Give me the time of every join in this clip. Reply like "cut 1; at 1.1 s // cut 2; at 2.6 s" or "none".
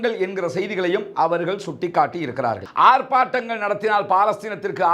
cut 1; at 2.6 s